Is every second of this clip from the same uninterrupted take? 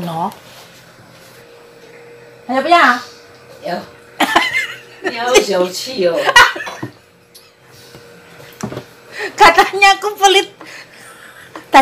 no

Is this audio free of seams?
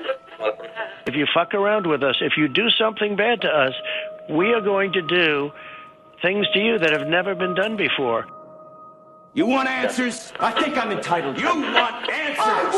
no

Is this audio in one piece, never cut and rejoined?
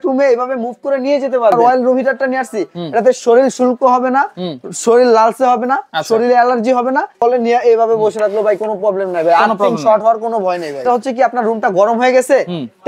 no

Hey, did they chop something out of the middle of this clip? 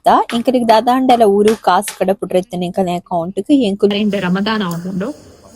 yes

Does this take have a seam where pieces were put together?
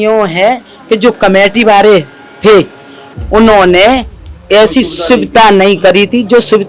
no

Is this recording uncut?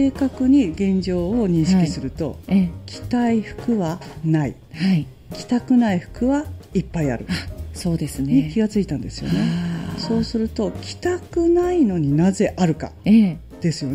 yes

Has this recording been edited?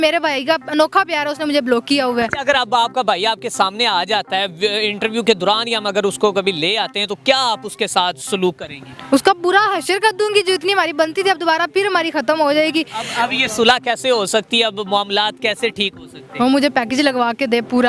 no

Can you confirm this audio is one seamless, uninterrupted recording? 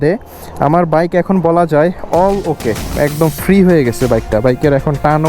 no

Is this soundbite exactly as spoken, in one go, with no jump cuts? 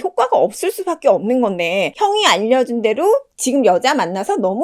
no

